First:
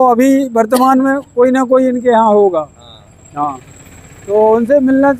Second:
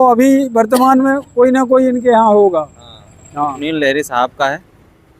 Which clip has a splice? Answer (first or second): second